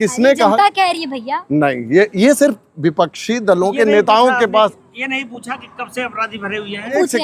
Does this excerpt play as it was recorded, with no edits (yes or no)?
yes